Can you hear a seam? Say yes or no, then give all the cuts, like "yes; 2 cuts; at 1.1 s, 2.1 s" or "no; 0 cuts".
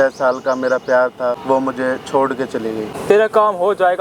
yes; 2 cuts; at 1.4 s, 2.9 s